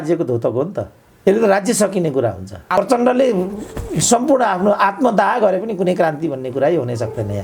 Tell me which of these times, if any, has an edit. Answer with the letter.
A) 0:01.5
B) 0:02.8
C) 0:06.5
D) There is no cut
B